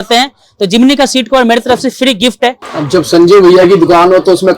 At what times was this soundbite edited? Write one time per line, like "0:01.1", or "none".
0:02.7